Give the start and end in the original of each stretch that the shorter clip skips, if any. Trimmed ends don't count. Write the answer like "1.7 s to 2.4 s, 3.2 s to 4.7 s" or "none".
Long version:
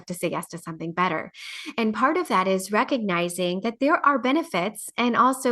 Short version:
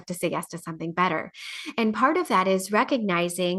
none